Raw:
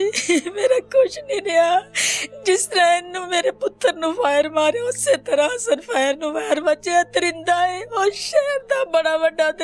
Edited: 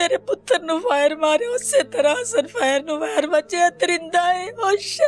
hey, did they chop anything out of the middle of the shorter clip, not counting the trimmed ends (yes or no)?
no